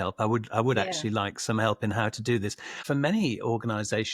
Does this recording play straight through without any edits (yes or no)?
no